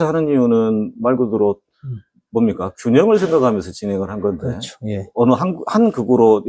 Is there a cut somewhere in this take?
no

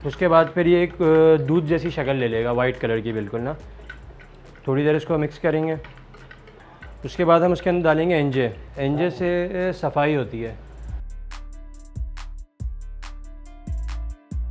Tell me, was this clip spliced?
no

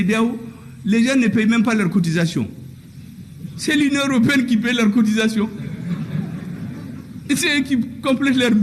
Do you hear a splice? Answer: no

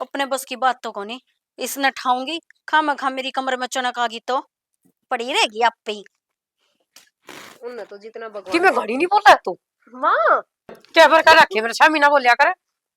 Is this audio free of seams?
no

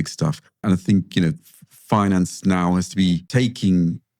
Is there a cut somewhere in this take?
yes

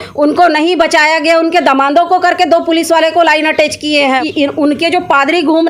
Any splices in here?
yes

